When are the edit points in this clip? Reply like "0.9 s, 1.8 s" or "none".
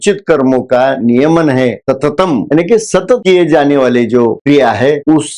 2.5 s